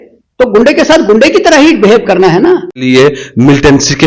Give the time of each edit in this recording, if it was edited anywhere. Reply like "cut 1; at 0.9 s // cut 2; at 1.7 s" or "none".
cut 1; at 2.8 s